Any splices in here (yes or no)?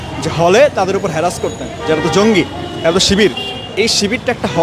no